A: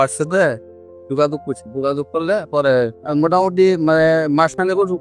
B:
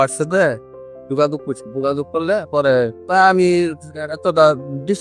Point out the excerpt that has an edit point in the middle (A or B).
A